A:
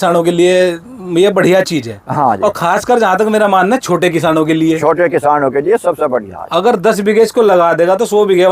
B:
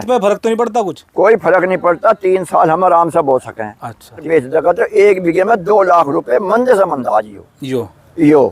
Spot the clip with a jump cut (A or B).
B